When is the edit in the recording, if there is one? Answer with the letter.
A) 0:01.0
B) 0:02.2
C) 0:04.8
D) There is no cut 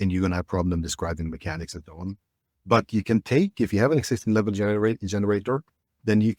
D